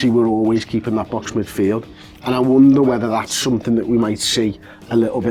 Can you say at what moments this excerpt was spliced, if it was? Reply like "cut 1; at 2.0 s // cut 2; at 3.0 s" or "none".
none